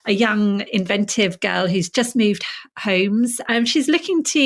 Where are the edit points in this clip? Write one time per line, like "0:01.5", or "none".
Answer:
0:03.4